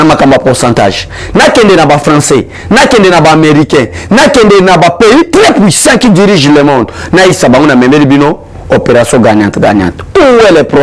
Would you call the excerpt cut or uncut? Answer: uncut